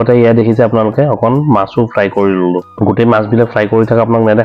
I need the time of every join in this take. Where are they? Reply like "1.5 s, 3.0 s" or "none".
2.7 s